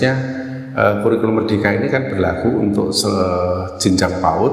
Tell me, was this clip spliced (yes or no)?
no